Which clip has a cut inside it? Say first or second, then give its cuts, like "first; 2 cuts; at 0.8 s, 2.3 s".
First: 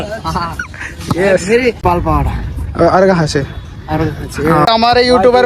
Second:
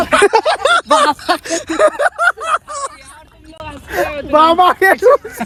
first; 2 cuts; at 1.8 s, 4.7 s